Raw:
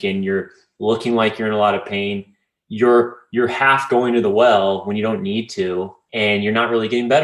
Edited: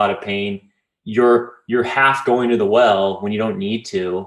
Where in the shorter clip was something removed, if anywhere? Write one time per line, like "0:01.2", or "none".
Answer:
none